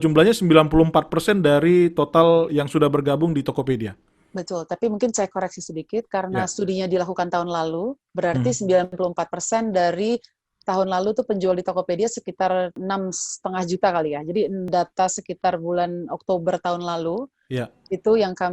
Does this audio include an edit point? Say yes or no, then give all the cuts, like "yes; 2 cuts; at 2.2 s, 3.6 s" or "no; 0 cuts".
yes; 3 cuts; at 8.9 s, 12.8 s, 14.7 s